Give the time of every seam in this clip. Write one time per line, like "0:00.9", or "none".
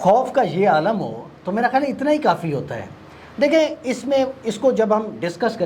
none